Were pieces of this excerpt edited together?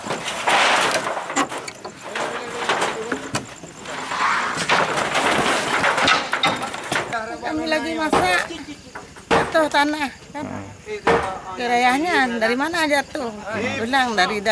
yes; 1 cut; at 7.1 s

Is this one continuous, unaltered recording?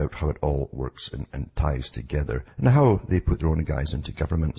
yes; 0 cuts

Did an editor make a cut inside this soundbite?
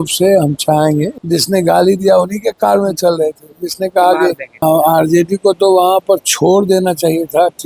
yes; 2 cuts; at 1.2 s, 4.6 s

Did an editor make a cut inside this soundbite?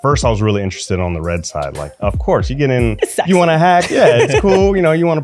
yes; 1 cut; at 1.9 s

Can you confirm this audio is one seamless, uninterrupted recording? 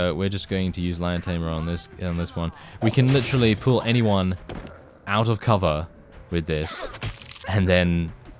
yes; 0 cuts

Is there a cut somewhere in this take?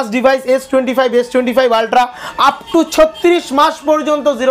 no; 0 cuts

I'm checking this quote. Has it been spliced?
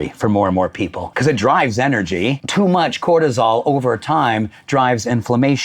yes; 2 cuts; at 1.0 s, 2.4 s

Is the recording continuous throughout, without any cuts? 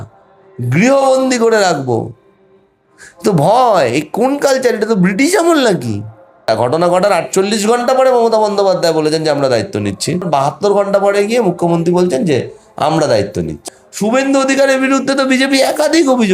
no; 3 cuts; at 6.5 s, 10.3 s, 13.6 s

